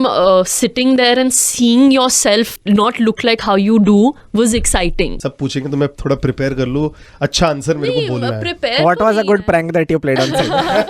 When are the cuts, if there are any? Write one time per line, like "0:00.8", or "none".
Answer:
0:02.6
0:05.2